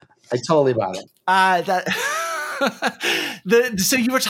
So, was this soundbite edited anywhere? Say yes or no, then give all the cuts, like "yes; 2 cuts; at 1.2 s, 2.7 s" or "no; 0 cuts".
yes; 1 cut; at 1.1 s